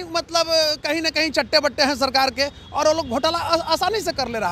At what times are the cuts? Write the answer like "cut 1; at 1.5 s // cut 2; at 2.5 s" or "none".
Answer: none